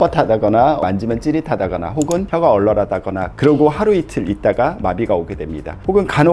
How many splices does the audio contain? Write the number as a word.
two